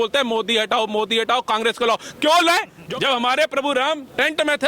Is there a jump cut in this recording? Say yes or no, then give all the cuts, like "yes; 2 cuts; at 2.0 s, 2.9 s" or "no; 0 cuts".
yes; 1 cut; at 2.8 s